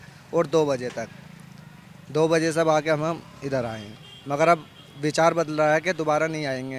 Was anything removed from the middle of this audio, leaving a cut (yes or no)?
no